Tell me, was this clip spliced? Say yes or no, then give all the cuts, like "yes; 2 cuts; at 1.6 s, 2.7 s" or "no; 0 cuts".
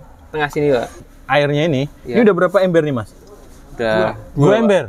yes; 1 cut; at 1.0 s